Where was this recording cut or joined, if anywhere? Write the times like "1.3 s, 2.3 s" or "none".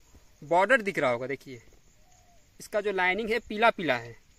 none